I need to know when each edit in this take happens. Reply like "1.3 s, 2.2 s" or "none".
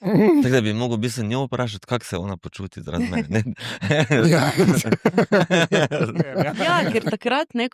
6.5 s